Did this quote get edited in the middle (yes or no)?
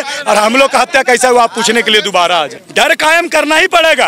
yes